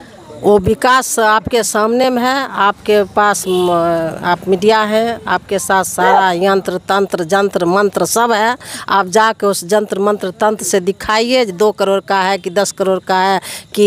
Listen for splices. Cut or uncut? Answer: uncut